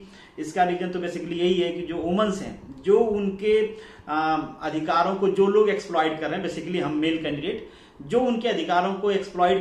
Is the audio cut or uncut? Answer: uncut